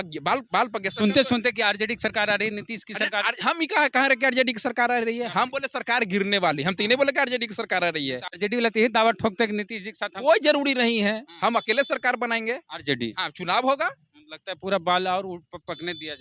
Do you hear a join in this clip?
no; 0 cuts

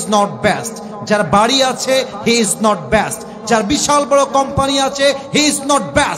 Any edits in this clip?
no; 0 cuts

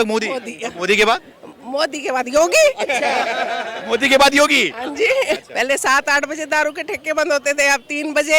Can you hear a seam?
yes; 1 cut; at 5.4 s

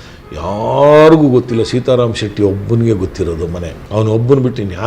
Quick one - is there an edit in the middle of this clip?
yes; 1 cut; at 3.8 s

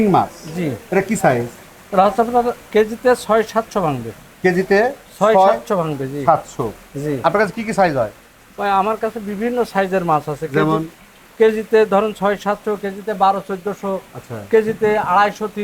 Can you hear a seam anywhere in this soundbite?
no; 0 cuts

